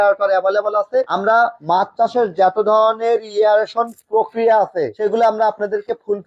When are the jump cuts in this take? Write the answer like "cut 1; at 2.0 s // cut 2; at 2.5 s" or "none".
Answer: none